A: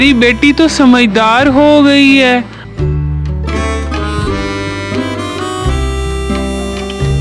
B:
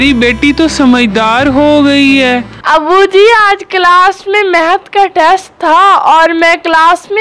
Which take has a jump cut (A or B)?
B